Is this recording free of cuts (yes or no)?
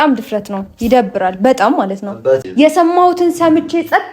no